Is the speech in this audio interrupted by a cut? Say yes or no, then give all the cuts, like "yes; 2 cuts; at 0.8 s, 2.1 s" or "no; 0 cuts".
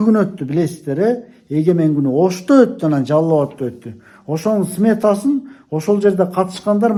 no; 0 cuts